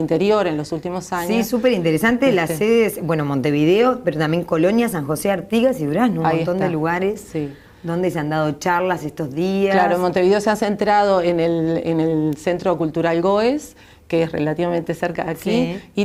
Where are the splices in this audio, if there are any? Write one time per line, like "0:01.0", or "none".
none

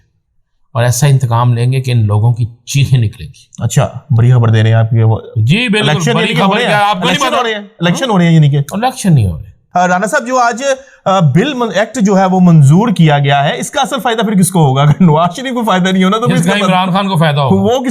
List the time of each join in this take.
0:09.5

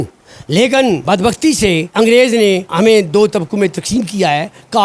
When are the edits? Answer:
0:01.0
0:01.9
0:02.7

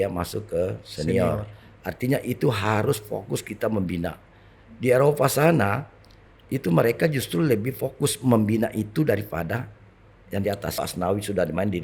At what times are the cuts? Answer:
0:10.8

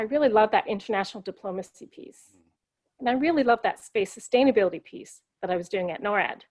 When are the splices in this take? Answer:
none

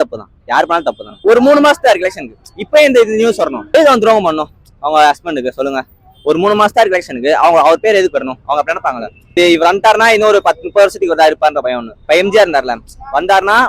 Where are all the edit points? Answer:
0:01.1
0:03.6
0:09.3
0:11.9

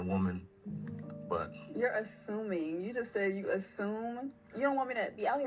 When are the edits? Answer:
0:02.9

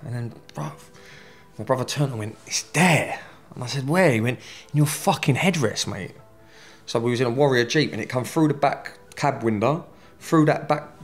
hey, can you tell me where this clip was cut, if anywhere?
none

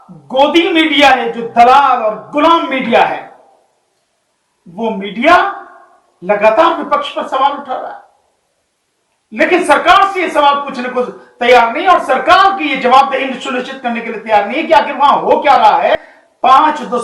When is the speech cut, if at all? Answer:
0:15.9

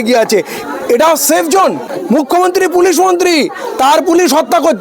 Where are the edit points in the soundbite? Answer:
0:01.9

